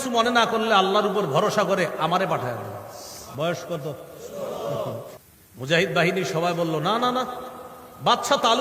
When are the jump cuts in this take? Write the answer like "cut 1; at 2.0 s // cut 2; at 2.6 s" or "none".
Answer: cut 1; at 3.2 s // cut 2; at 5.1 s